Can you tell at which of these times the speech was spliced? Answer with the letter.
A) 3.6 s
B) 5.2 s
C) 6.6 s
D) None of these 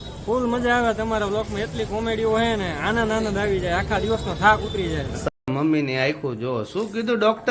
B